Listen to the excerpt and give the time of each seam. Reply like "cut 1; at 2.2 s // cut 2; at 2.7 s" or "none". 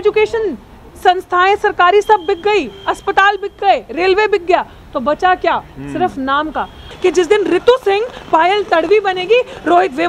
cut 1; at 6.9 s